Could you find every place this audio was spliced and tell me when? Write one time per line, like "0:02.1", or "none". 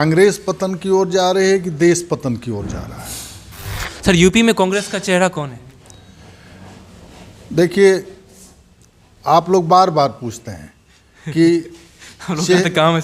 0:03.9